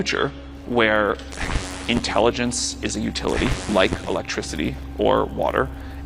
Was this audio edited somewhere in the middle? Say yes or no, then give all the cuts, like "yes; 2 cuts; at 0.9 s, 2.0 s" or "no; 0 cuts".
no; 0 cuts